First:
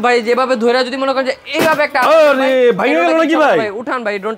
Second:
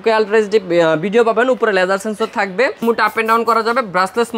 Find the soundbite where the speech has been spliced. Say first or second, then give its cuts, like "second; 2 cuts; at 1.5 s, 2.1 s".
second; 1 cut; at 2.8 s